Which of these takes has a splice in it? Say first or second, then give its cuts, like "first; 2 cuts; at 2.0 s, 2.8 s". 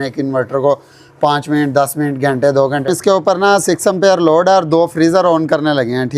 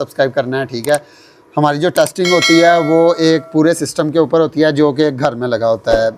first; 1 cut; at 2.8 s